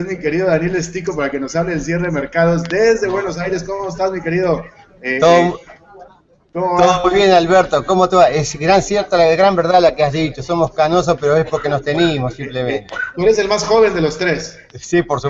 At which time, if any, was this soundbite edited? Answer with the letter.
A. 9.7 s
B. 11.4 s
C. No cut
A